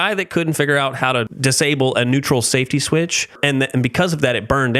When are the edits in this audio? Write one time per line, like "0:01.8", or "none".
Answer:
0:01.3
0:03.4

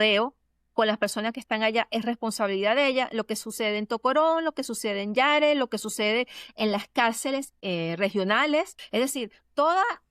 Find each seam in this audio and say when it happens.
0:08.8

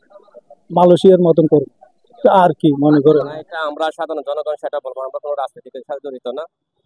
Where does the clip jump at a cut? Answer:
0:03.4

